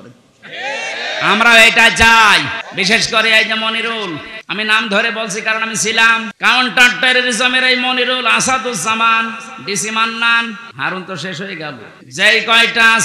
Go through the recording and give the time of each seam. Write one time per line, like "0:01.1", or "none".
0:02.6
0:04.4
0:06.3
0:10.7
0:11.9

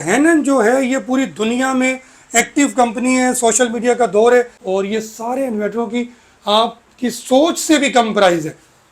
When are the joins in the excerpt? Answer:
0:04.6

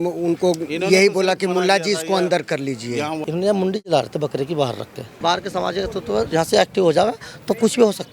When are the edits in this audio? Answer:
0:03.2
0:05.2

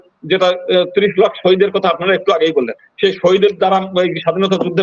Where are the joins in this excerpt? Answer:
none

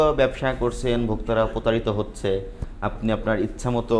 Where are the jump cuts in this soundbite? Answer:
none

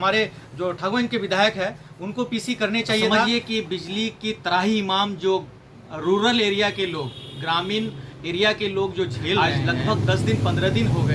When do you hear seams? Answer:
0:03.2
0:09.4

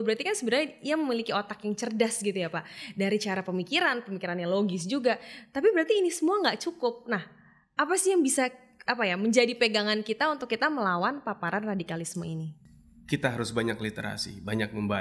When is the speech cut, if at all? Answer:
none

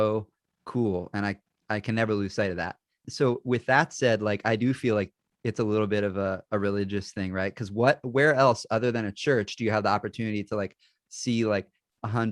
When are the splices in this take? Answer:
none

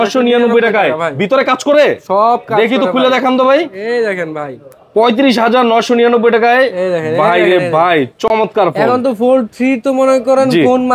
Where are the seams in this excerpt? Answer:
none

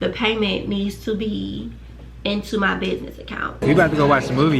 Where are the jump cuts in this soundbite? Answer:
0:03.6

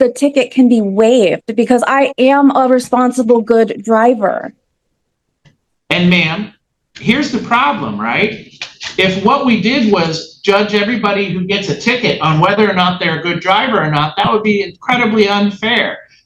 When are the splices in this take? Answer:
none

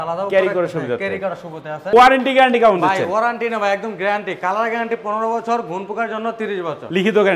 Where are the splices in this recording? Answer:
0:01.9

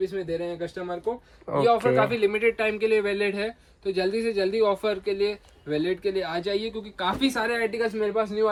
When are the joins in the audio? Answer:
none

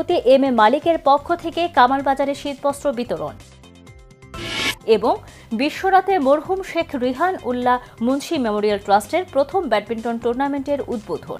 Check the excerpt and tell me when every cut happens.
none

